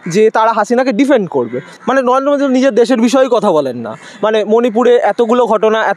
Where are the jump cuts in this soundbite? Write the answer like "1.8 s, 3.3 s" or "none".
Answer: 1.7 s